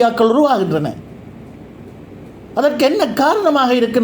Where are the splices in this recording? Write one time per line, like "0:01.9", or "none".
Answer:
none